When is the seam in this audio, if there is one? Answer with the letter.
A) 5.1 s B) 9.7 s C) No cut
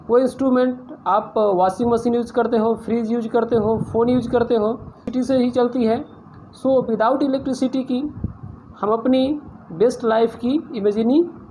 A